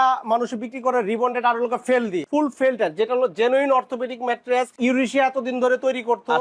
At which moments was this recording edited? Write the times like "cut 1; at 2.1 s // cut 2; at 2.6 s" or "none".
cut 1; at 2.2 s // cut 2; at 4.8 s